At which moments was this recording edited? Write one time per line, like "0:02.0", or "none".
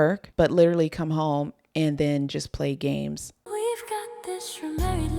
0:03.5